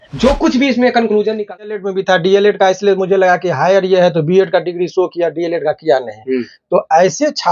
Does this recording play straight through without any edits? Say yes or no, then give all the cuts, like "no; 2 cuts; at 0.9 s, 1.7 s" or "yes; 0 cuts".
no; 1 cut; at 1.7 s